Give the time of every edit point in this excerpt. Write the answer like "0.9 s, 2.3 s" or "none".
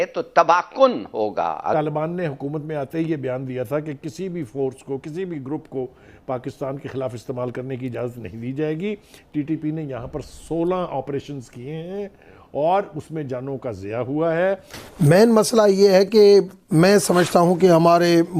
1.7 s, 14.8 s

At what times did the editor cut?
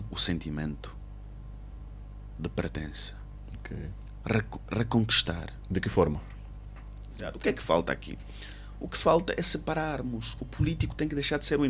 7.4 s

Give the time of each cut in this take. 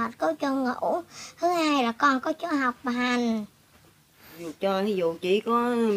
4.5 s

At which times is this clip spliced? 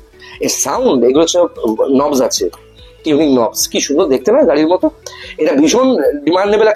none

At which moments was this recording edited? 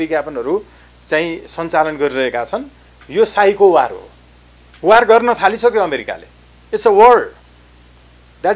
none

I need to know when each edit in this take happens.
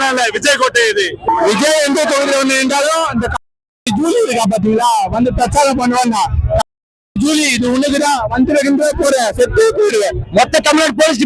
10.2 s

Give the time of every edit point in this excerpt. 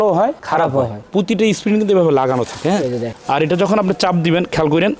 1.0 s, 3.1 s

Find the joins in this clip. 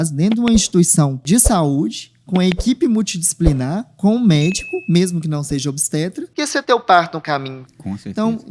1.2 s, 6.3 s

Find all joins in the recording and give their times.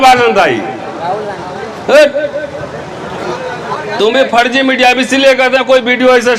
none

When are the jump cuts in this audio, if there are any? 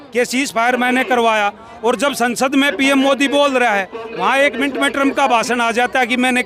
none

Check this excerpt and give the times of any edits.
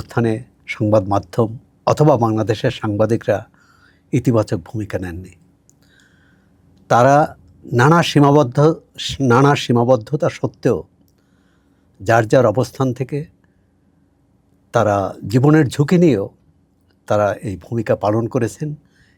none

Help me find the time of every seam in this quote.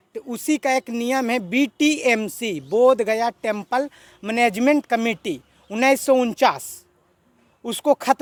none

